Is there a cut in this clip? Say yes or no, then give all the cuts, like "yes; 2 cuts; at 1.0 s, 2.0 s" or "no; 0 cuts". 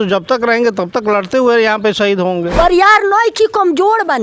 yes; 1 cut; at 2.5 s